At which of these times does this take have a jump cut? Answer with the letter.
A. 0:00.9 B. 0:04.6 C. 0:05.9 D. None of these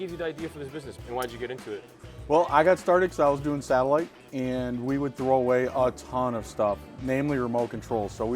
A